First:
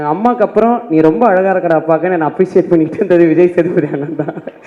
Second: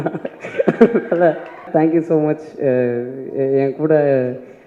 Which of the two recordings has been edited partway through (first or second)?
second